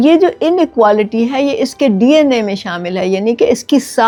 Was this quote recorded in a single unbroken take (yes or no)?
yes